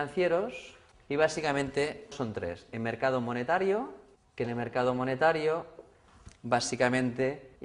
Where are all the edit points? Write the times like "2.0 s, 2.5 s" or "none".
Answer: 5.5 s